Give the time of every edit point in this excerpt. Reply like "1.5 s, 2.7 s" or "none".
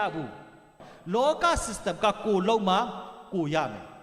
0.9 s